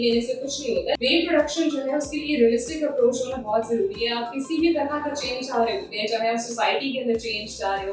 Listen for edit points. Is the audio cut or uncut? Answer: cut